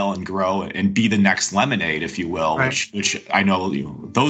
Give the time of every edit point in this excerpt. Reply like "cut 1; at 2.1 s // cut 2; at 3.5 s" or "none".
none